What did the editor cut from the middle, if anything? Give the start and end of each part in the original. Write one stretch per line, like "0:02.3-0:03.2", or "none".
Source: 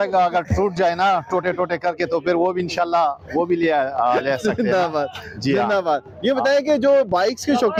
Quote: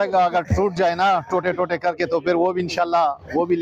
none